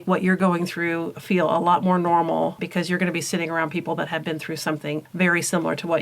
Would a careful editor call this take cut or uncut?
cut